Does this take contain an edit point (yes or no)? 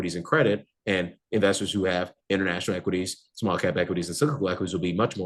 no